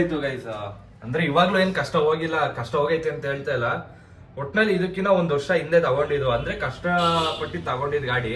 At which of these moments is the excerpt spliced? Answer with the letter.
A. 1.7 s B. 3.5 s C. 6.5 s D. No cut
D